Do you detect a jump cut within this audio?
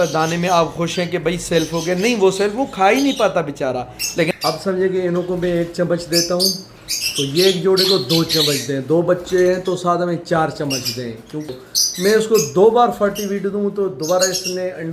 yes; 2 cuts; at 4.3 s, 11.5 s

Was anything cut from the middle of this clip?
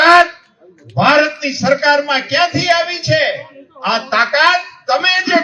no; 0 cuts

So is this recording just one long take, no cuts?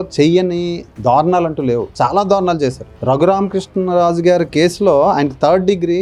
yes; 0 cuts

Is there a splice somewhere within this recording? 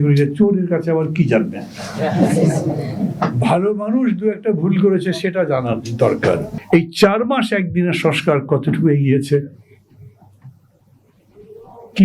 yes; 1 cut; at 6.5 s

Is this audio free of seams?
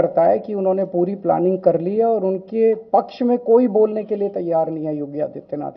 yes; 0 cuts

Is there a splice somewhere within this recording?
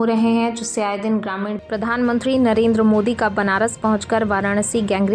yes; 1 cut; at 1.6 s

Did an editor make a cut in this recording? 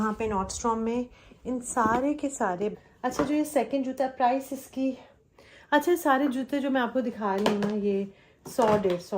yes; 1 cut; at 2.7 s

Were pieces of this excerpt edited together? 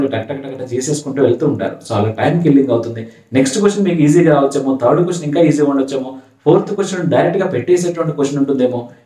no; 0 cuts

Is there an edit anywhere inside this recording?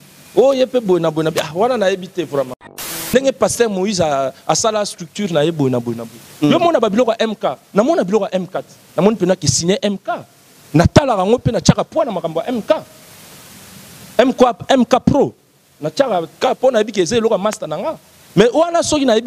yes; 1 cut; at 3.0 s

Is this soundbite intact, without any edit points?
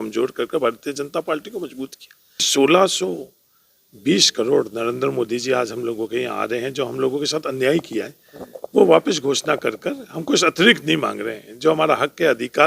no; 1 cut; at 2.5 s

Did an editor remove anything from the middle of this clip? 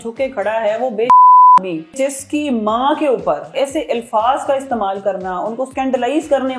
yes; 3 cuts; at 1.9 s, 3.5 s, 5.7 s

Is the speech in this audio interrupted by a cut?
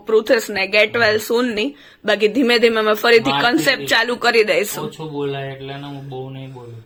no; 0 cuts

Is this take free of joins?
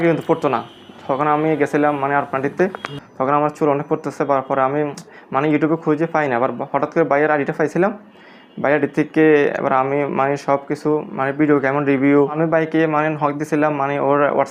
yes; 0 cuts

